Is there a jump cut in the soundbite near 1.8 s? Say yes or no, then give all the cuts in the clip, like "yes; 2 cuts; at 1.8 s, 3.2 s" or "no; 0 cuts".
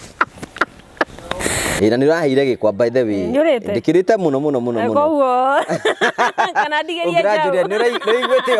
yes; 1 cut; at 1.8 s